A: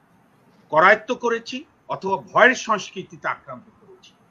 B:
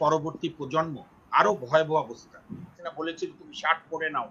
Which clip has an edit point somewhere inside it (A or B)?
B